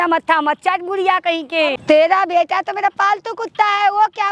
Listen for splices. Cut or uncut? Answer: cut